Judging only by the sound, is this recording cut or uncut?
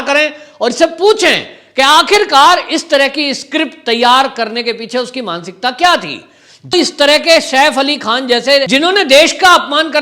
cut